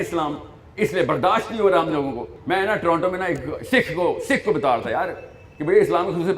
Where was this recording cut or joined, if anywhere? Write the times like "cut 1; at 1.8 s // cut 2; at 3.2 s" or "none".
cut 1; at 2.3 s